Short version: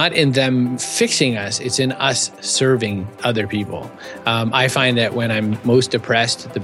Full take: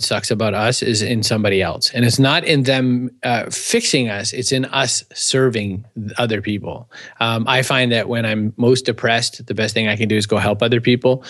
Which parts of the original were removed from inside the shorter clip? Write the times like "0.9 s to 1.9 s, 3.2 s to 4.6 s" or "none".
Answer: 3.1 s to 3.6 s, 5.9 s to 6.1 s